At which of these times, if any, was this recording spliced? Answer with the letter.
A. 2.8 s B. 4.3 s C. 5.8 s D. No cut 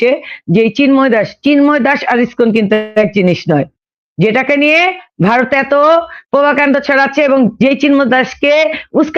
D